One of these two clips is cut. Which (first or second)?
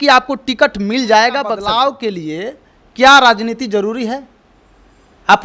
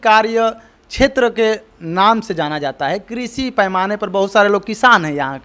first